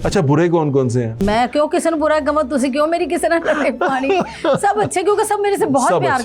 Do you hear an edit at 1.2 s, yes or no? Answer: yes